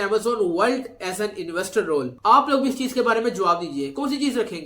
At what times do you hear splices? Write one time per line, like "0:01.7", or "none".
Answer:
0:02.1